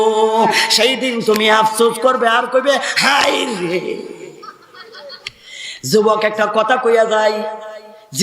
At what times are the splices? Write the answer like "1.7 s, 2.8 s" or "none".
5.2 s